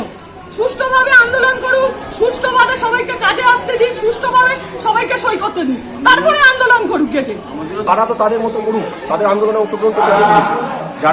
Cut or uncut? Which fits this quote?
cut